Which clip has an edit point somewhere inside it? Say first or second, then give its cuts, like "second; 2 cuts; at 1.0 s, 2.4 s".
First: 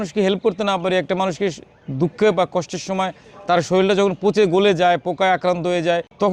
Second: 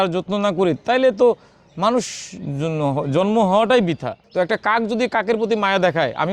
second; 1 cut; at 4.1 s